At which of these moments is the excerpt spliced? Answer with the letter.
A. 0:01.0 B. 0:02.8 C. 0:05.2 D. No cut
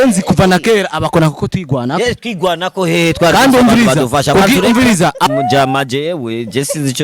C